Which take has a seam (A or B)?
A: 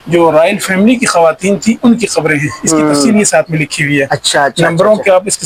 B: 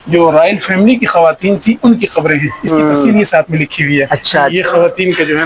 B